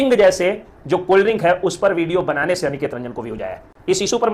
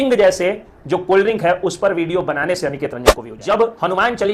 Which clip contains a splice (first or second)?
second